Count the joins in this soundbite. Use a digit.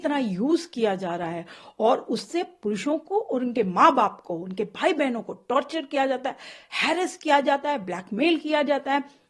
0